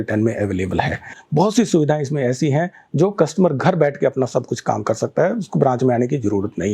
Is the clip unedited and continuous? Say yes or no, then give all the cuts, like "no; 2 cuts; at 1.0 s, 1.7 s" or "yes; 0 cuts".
no; 1 cut; at 1.1 s